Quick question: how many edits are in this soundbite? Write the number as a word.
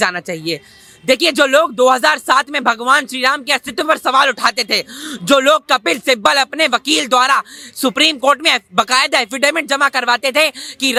zero